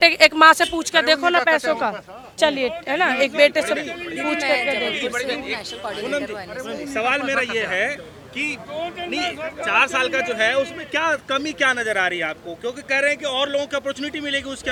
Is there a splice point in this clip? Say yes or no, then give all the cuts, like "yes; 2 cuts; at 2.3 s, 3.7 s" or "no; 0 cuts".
no; 0 cuts